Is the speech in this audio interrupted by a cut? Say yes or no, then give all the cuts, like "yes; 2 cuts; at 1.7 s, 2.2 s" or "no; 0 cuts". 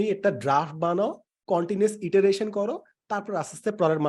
no; 0 cuts